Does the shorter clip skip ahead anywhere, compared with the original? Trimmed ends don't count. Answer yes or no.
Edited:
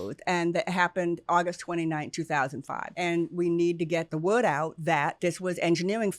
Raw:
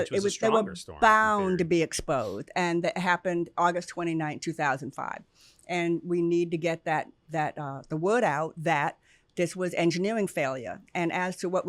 yes